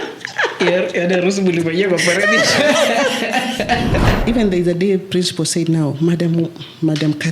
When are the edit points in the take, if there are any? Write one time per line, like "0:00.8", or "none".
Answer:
0:04.2